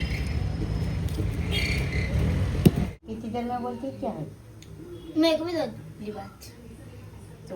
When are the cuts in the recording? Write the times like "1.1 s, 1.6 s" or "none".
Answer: 3.0 s